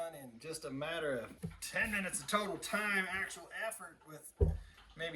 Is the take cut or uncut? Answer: cut